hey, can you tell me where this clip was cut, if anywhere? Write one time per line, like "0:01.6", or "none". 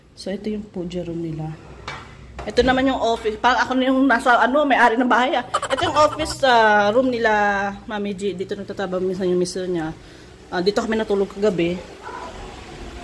none